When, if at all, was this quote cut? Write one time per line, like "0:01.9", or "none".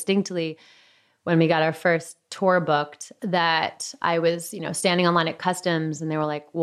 0:03.0